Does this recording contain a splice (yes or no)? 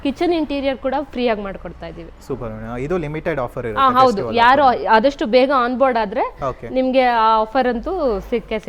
no